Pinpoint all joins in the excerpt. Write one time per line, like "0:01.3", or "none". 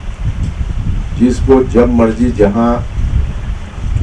none